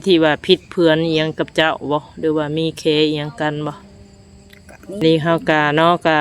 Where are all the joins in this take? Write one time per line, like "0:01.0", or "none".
0:04.9